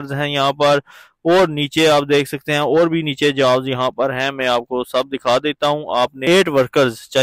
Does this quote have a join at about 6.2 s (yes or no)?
yes